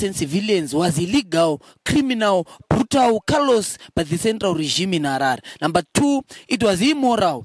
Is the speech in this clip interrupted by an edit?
no; 0 cuts

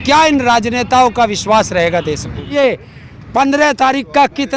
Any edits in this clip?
yes; 1 cut; at 2.5 s

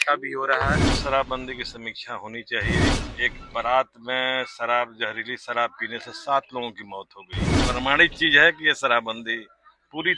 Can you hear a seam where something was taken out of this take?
yes; 3 cuts; at 1.0 s, 2.9 s, 7.6 s

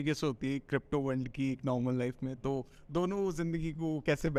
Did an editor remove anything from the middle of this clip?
no; 0 cuts

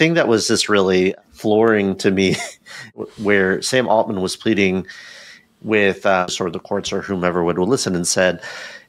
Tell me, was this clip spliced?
yes; 3 cuts; at 1.1 s, 2.9 s, 6.3 s

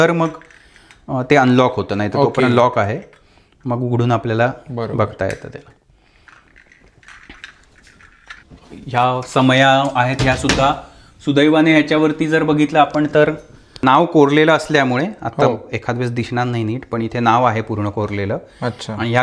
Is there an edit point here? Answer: no; 0 cuts

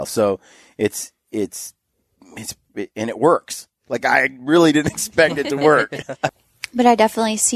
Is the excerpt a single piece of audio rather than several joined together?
no; 1 cut; at 6.2 s

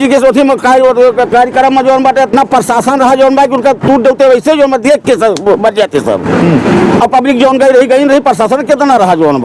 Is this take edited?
no; 0 cuts

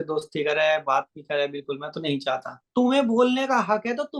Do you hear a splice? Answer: yes; 1 cut; at 2.6 s

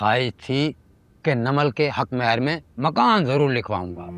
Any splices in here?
no; 0 cuts

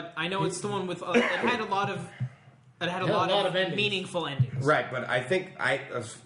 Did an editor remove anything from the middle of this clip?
no; 0 cuts

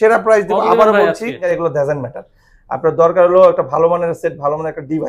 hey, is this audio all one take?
no; 1 cut; at 1.5 s

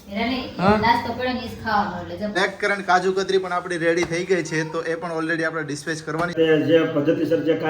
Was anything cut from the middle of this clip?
yes; 2 cuts; at 2.4 s, 6.3 s

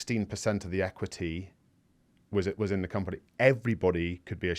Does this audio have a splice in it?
no; 0 cuts

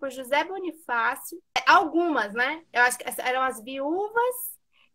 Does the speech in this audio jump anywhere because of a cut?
yes; 1 cut; at 1.5 s

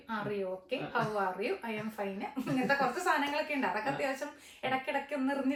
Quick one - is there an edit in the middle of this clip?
no; 0 cuts

